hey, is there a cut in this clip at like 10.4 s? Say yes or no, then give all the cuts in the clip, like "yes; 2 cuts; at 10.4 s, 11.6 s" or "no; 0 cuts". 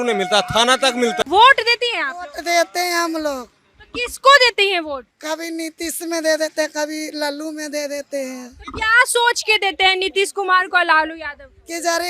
no; 2 cuts; at 1.2 s, 5.1 s